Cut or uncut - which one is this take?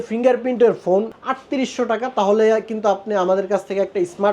cut